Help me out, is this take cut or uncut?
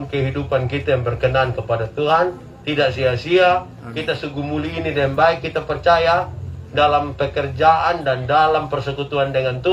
uncut